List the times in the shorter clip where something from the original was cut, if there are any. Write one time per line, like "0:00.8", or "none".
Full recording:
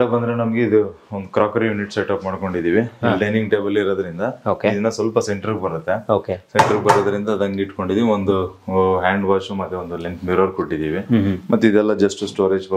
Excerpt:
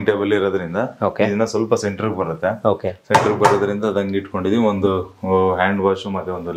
none